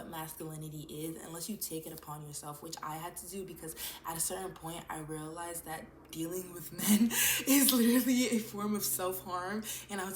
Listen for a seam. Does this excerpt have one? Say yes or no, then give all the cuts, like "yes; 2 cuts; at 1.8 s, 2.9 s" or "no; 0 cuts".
no; 0 cuts